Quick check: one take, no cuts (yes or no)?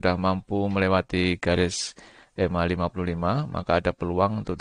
yes